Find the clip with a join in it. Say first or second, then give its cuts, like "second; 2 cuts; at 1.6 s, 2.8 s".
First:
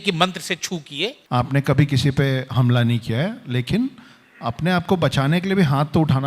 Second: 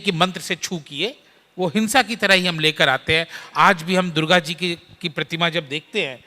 first; 1 cut; at 1.2 s